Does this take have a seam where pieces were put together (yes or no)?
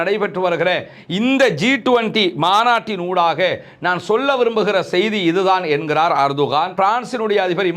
yes